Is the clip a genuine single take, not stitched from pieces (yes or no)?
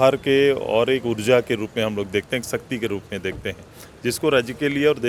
yes